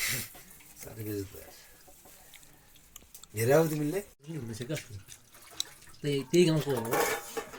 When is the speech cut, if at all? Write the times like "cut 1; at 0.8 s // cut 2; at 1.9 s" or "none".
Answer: none